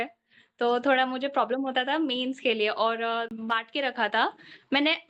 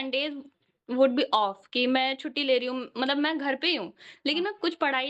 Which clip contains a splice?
first; 1 cut; at 3.3 s

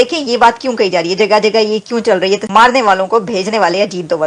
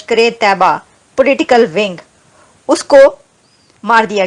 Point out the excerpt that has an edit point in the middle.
first; 1 cut; at 2.4 s

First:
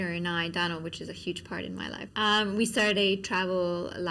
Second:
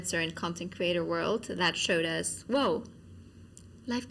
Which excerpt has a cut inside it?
first; 1 cut; at 2.0 s

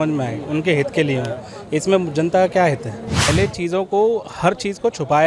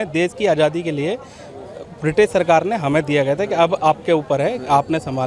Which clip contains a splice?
first; 1 cut; at 3.3 s

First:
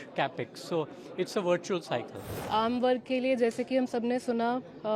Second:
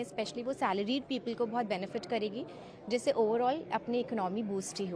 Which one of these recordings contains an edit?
first; 1 cut; at 2.4 s

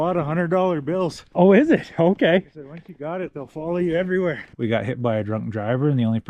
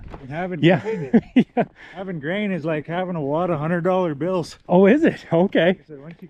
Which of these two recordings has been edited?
first; 1 cut; at 4.5 s

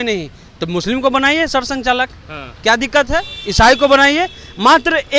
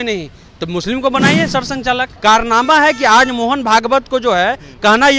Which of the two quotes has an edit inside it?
second; 1 cut; at 2.1 s

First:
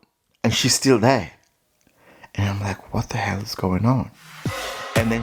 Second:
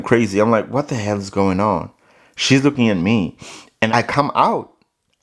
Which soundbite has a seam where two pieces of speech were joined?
second; 1 cut; at 3.9 s

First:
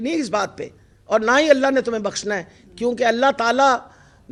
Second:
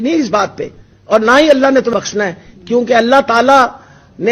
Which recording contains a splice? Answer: second; 1 cut; at 1.9 s

